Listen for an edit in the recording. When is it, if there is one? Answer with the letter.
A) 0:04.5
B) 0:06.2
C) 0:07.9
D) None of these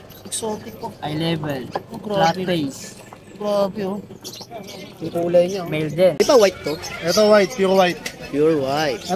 B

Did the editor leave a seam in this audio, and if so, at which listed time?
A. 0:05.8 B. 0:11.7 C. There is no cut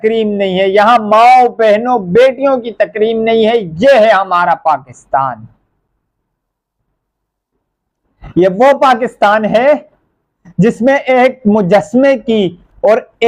C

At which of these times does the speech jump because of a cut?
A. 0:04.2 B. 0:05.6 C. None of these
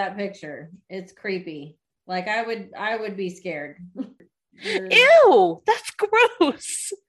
A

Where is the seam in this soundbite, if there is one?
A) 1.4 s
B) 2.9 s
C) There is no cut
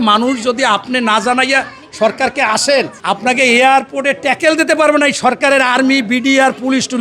B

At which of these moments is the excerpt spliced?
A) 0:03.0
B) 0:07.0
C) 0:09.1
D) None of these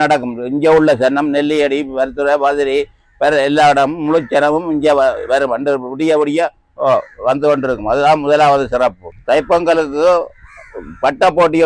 C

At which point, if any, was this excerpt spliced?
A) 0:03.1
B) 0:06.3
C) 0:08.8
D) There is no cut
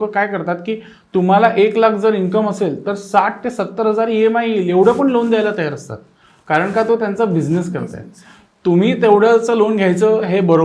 D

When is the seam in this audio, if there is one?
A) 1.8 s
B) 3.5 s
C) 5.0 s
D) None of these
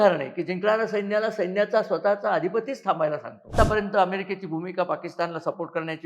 B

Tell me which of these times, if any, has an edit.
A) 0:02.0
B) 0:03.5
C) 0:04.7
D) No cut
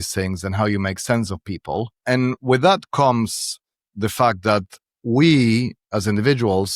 A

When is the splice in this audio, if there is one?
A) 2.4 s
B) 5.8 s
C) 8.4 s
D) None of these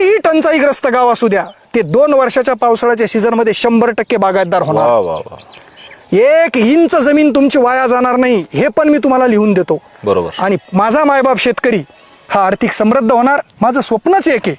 D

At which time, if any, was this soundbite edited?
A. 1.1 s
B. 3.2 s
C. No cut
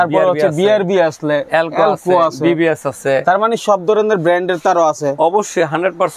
C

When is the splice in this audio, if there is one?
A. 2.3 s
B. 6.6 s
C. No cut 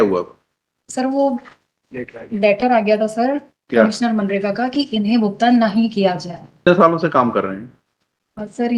B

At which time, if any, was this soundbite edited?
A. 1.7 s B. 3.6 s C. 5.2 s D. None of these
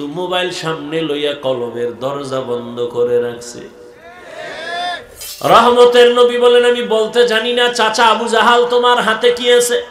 C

